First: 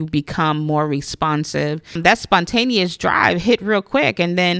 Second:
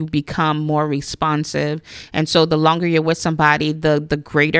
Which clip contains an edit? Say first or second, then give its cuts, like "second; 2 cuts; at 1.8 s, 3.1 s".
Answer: first; 1 cut; at 2.0 s